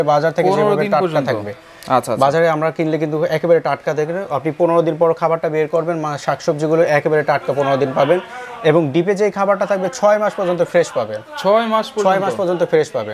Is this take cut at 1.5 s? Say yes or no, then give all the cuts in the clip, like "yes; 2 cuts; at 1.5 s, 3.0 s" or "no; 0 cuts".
no; 0 cuts